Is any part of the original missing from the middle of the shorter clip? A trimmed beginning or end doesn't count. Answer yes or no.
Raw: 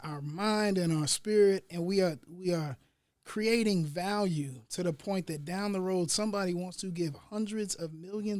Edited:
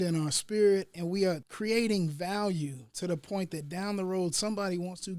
yes